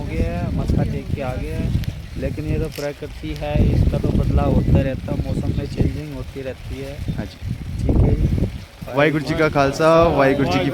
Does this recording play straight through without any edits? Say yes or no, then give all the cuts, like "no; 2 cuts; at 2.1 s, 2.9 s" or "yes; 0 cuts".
yes; 0 cuts